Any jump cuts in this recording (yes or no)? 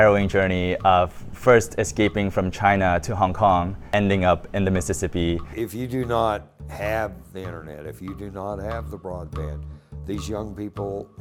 yes